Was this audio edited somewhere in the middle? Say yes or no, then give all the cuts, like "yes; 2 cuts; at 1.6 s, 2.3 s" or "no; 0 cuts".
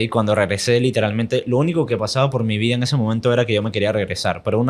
no; 0 cuts